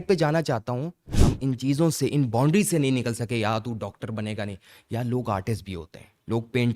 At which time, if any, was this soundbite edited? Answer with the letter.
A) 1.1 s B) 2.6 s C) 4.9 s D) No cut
A